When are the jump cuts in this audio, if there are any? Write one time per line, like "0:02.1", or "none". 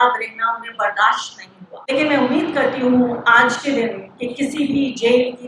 0:01.9